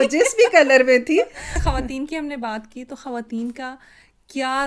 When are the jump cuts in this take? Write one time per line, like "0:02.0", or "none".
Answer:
0:01.5